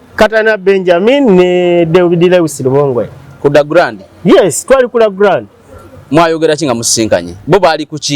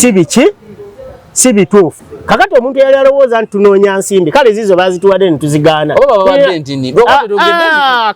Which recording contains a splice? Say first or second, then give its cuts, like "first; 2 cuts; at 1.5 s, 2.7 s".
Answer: second; 1 cut; at 2.1 s